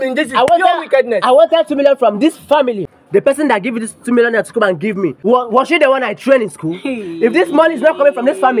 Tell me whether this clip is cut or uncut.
cut